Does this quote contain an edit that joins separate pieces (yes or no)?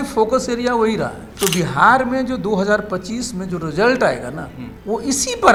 no